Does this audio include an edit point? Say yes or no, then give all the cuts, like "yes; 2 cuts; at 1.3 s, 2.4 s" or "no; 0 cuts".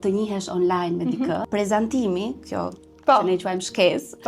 yes; 1 cut; at 1.4 s